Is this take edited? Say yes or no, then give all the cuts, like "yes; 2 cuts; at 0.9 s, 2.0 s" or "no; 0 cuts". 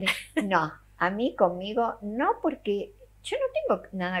yes; 1 cut; at 3.1 s